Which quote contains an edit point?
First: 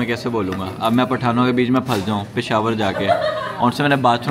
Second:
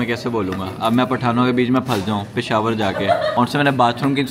second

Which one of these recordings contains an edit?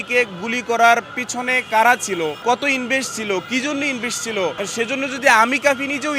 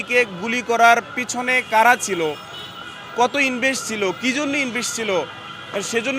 first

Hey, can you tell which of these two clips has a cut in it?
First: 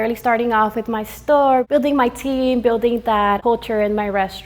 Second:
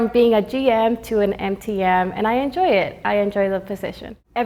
first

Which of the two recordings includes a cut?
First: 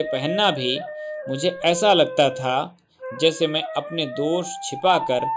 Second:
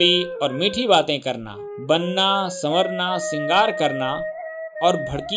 second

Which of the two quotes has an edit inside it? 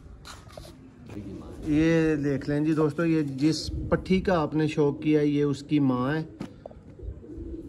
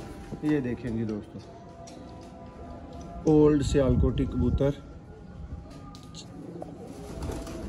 first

